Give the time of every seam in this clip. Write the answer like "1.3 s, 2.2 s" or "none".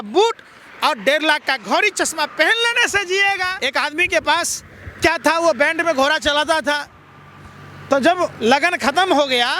3.6 s